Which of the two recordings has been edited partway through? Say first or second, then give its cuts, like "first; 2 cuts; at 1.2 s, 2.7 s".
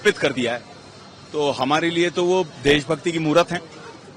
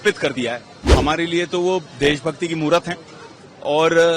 second; 1 cut; at 0.9 s